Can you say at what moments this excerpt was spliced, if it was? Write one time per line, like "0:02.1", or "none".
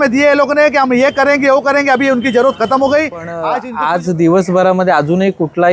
0:03.5